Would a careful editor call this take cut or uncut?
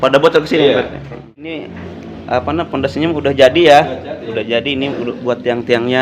cut